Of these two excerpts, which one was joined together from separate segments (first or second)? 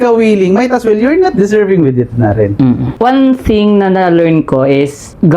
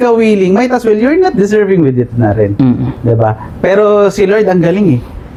first